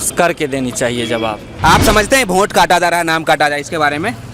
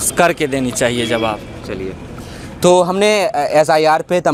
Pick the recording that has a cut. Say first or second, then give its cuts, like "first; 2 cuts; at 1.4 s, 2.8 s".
first; 1 cut; at 1.6 s